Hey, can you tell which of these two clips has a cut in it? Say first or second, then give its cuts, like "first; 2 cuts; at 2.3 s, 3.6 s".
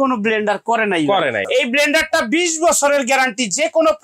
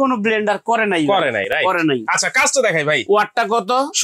first; 1 cut; at 1.5 s